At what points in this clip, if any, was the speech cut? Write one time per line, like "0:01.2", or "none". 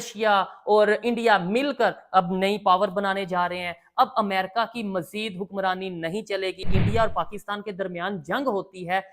0:06.7